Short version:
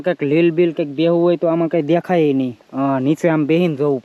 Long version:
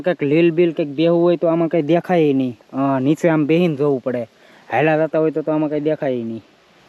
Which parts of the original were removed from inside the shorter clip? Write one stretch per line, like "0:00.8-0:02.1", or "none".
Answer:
none